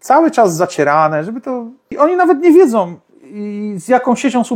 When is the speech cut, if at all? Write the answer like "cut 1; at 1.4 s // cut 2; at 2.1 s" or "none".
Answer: cut 1; at 1.9 s